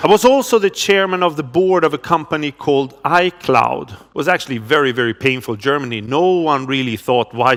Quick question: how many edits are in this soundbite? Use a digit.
0